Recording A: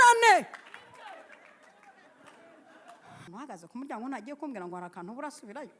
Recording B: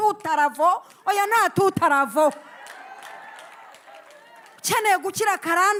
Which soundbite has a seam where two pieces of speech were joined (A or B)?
A